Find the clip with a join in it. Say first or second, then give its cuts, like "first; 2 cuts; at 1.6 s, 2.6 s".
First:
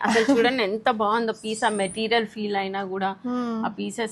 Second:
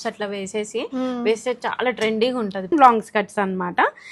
second; 1 cut; at 2.7 s